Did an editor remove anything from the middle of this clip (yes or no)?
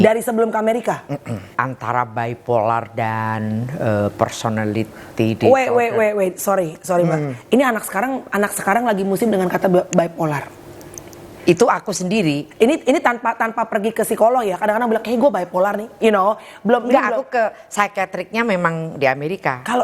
yes